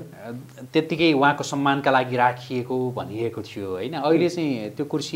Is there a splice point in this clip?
no; 0 cuts

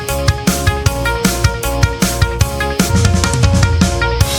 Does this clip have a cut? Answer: yes; 1 cut; at 2.9 s

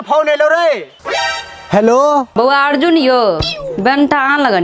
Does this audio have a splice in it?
no; 0 cuts

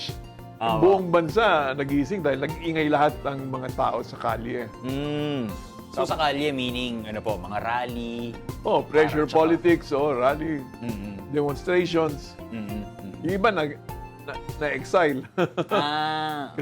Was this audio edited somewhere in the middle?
yes; 1 cut; at 5.8 s

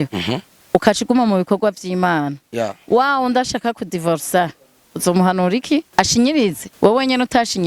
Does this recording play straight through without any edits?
no; 2 cuts; at 5.9 s, 6.7 s

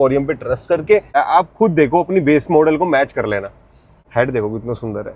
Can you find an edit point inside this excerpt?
yes; 2 cuts; at 1.1 s, 4.0 s

